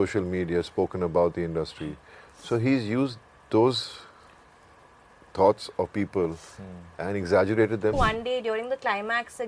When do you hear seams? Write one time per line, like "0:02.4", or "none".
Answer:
0:07.9